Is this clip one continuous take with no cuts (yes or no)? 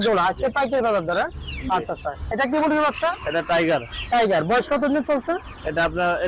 yes